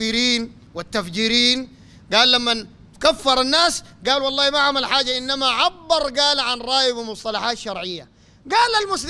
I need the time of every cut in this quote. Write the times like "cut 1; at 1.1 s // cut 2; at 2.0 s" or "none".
cut 1; at 8.1 s